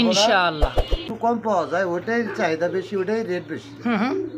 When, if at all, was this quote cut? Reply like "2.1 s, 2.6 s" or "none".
1.1 s